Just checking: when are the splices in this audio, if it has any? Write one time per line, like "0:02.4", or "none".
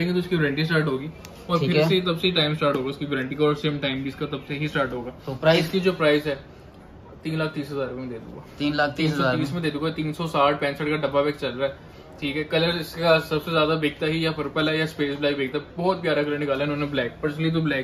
none